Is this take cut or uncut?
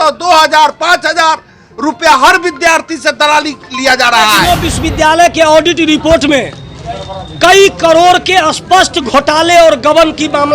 cut